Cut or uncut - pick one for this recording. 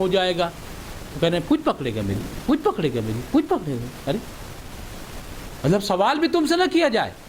uncut